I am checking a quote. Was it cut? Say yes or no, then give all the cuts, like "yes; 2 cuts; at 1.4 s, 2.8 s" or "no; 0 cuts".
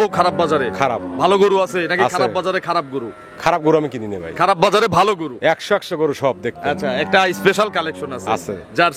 no; 0 cuts